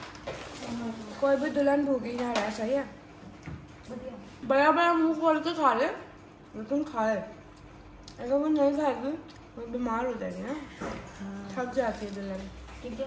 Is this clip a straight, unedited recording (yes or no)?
yes